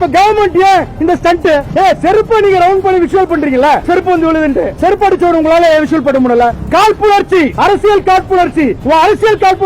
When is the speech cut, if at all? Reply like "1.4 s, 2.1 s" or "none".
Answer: 1.7 s, 6.5 s, 7.5 s, 8.8 s